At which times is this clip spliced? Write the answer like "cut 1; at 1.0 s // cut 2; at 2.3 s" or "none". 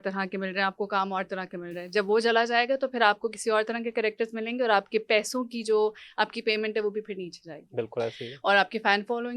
none